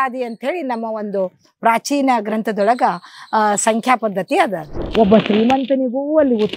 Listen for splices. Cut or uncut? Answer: cut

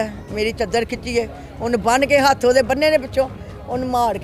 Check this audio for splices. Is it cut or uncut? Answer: uncut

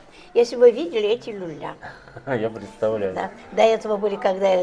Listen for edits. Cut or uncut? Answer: uncut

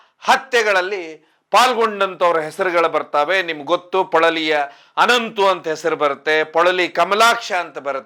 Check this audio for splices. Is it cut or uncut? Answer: uncut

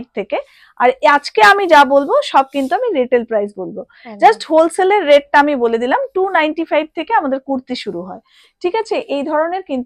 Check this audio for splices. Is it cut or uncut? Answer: uncut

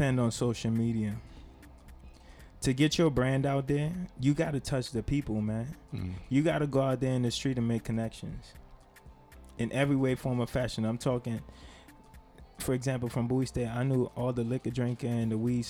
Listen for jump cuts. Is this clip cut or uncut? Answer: uncut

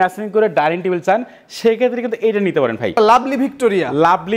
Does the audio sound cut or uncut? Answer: cut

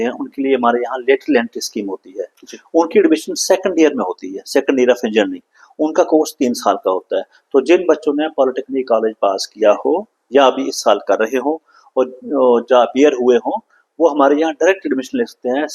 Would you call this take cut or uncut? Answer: uncut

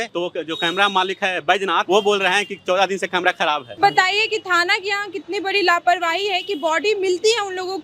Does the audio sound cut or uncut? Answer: cut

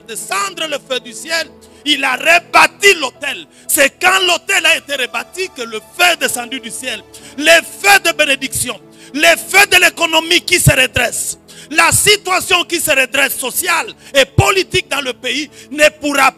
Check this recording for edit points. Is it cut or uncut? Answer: uncut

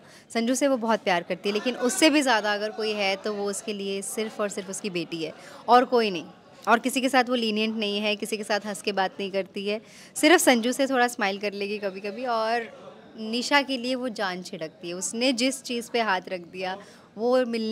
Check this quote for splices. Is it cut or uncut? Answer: uncut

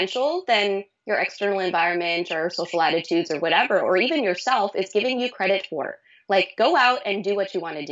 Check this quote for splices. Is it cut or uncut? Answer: uncut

